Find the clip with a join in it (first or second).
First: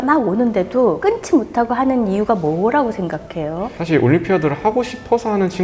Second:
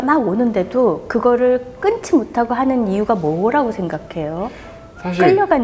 first